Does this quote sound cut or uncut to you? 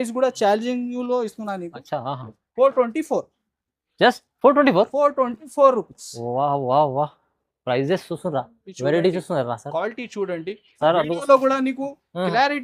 uncut